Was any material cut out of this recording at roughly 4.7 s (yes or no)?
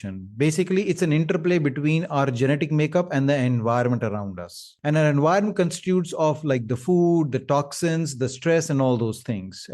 yes